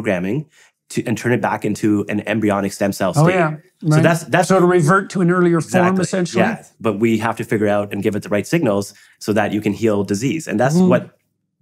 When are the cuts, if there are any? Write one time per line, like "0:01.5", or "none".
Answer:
0:06.7